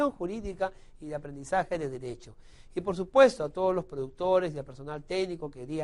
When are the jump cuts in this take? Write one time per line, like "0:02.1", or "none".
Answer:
0:03.3